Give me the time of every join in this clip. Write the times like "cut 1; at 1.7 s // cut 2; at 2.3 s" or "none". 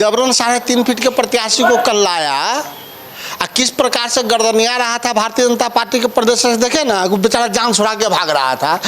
none